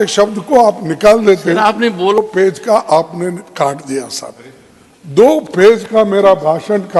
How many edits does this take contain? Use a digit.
1